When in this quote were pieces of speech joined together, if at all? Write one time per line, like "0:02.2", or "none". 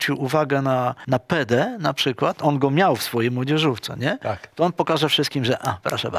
0:01.0